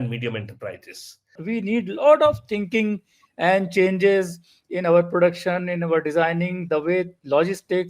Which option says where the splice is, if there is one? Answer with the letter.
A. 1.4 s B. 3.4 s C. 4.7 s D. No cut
A